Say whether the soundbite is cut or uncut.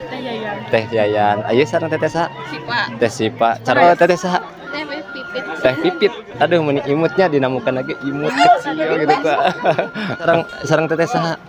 cut